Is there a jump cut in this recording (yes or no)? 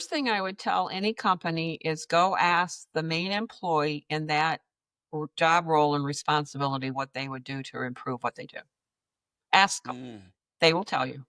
no